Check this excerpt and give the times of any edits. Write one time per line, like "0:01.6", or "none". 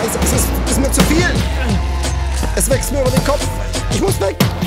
none